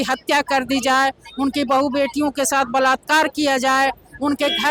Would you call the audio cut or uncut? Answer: uncut